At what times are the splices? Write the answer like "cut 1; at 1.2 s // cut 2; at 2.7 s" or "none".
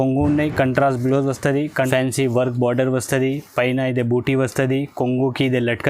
cut 1; at 1.8 s